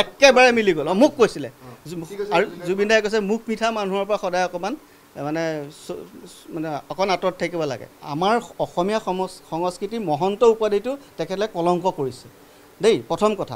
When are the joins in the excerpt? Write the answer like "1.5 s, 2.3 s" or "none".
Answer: 8.0 s

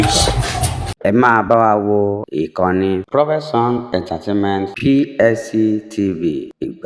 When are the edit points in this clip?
1.0 s

